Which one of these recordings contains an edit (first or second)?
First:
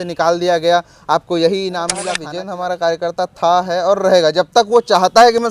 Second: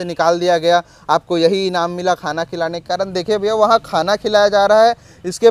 first